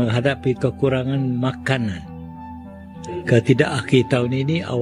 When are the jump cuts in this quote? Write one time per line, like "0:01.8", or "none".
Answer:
none